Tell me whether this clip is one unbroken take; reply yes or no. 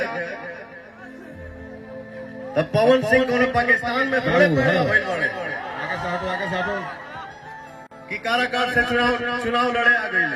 yes